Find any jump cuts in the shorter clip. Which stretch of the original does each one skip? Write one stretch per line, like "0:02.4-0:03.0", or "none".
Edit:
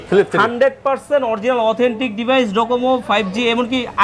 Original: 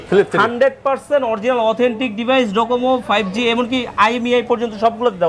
none